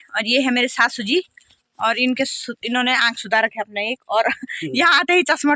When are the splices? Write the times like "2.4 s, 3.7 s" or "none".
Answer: none